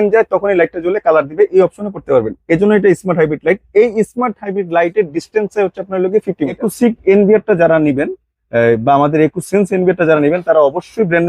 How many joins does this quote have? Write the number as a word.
one